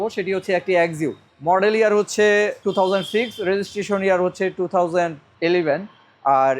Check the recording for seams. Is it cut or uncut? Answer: cut